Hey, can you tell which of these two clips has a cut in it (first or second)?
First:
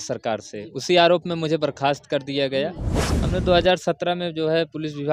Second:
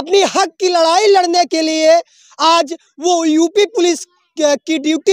first